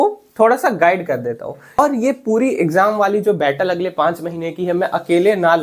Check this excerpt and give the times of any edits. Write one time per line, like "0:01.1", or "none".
0:01.8

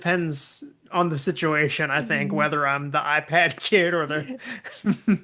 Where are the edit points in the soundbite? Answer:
none

